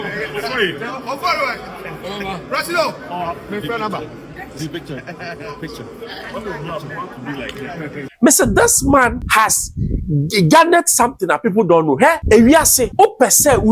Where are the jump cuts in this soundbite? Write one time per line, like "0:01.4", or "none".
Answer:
0:08.0
0:09.2
0:12.2
0:12.8

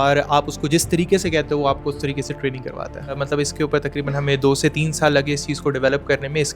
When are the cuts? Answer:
0:03.2

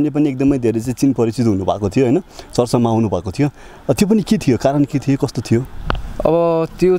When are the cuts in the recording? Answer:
none

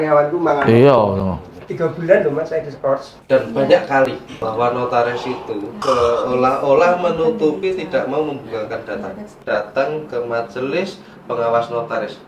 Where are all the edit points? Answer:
0:03.1
0:04.3
0:05.8
0:09.4

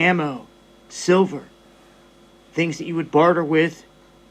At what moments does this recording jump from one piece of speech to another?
0:03.1

